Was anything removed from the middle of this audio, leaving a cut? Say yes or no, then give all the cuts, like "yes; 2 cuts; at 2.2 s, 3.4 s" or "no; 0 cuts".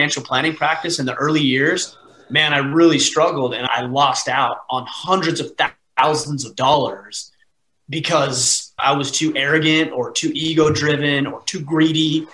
yes; 2 cuts; at 3.7 s, 8.8 s